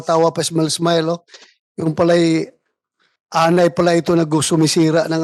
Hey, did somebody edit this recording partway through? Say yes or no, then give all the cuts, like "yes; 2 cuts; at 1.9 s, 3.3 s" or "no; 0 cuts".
no; 0 cuts